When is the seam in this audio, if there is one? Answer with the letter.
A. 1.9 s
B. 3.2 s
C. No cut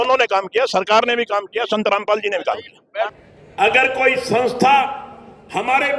B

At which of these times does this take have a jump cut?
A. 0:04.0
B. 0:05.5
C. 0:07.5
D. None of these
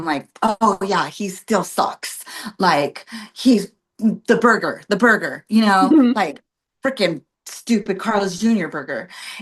D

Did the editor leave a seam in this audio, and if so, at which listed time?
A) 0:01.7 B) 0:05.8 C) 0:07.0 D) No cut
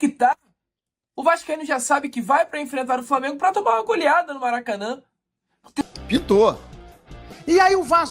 B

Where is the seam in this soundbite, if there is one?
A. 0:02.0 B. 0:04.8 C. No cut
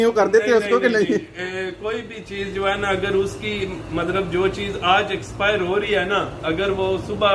C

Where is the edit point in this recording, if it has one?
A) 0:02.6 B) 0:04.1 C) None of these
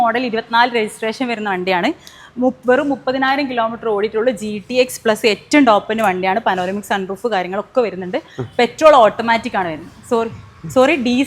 C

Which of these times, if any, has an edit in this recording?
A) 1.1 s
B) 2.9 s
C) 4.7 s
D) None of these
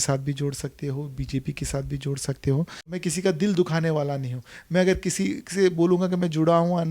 B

